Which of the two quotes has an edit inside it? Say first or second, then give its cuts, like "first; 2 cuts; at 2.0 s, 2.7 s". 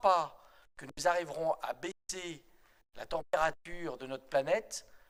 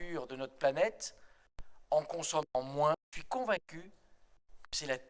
second; 1 cut; at 3.1 s